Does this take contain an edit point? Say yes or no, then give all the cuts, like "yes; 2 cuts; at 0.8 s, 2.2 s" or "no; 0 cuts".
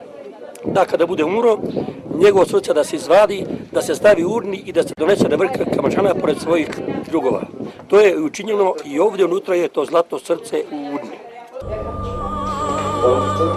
no; 0 cuts